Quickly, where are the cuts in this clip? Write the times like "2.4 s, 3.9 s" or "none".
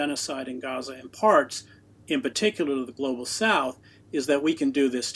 none